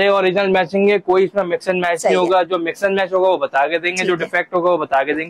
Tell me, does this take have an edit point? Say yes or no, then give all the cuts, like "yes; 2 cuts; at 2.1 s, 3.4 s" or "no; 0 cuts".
no; 0 cuts